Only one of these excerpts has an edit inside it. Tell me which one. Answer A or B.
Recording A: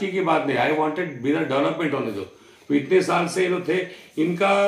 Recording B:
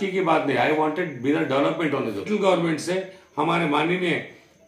B